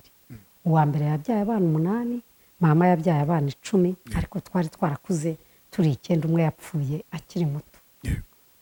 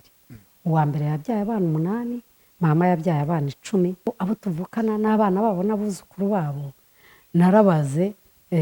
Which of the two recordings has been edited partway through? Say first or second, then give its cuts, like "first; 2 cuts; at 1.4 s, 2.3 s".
second; 1 cut; at 4.1 s